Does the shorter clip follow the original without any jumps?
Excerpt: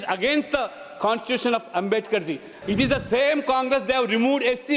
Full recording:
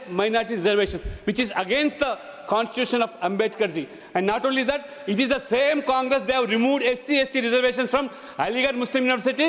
no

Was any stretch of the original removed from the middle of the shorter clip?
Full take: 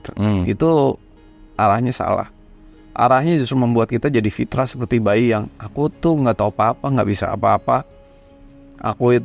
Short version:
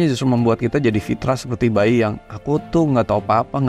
no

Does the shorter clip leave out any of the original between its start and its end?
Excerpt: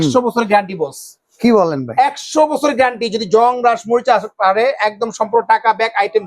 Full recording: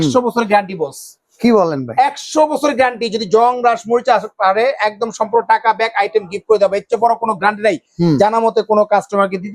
no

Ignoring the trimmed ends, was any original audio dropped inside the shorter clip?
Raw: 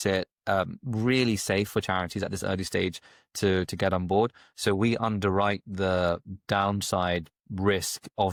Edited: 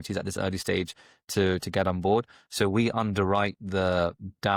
no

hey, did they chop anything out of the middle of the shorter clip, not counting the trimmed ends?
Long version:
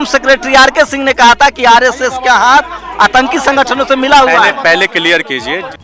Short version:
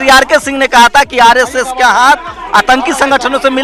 no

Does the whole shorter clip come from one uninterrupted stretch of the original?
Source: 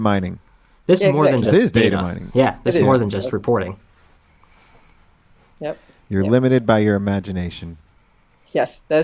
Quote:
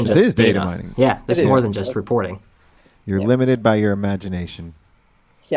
no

